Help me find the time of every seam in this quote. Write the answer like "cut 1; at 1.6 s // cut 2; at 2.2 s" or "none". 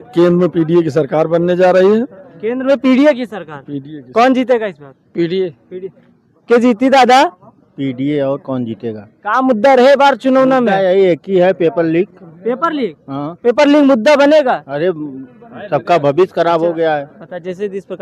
none